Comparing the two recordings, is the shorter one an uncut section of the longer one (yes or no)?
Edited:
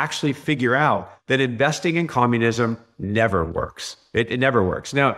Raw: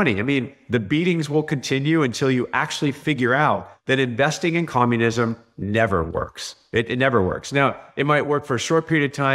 yes